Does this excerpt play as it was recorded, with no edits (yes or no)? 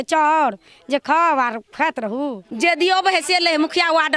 no